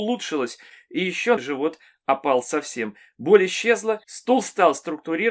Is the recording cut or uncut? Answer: cut